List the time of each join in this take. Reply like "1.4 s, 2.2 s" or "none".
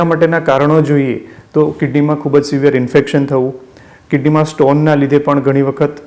none